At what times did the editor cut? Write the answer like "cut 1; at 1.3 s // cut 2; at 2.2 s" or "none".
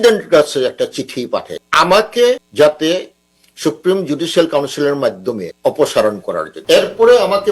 cut 1; at 1.6 s // cut 2; at 2.5 s // cut 3; at 5.5 s // cut 4; at 6.5 s

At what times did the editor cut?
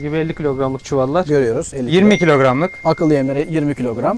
cut 1; at 2.7 s

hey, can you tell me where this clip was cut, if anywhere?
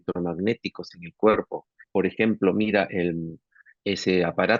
cut 1; at 1.7 s // cut 2; at 3.6 s

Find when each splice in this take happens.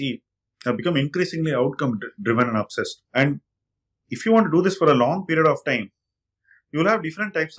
cut 1; at 3.0 s

